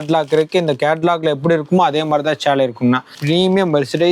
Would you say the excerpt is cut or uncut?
cut